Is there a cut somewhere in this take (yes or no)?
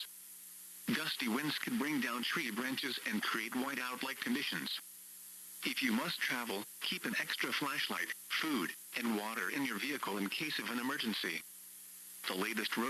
no